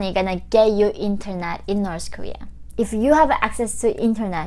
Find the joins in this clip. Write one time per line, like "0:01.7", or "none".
0:02.8